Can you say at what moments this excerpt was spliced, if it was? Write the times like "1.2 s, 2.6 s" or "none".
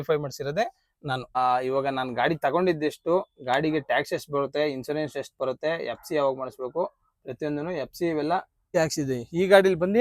1.3 s, 8.7 s